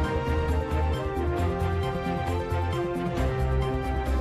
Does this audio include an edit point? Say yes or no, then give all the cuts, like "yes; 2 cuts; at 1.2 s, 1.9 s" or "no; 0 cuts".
yes; 1 cut; at 2.5 s